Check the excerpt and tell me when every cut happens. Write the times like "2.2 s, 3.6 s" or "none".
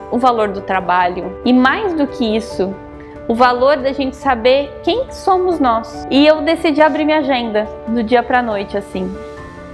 1.3 s, 6.0 s